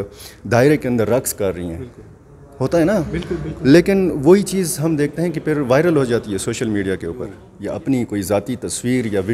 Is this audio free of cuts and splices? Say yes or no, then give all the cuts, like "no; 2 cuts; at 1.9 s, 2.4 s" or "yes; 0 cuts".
no; 1 cut; at 7.5 s